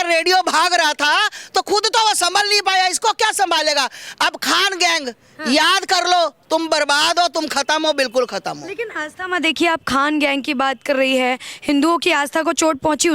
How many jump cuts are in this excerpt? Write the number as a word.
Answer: zero